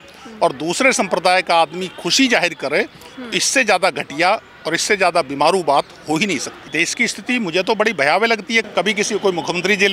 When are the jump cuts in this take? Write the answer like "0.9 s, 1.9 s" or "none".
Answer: 6.7 s, 8.6 s